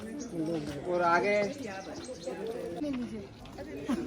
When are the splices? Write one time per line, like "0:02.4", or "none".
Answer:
0:02.8